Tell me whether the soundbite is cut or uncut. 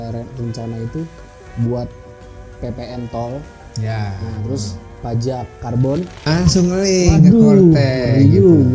cut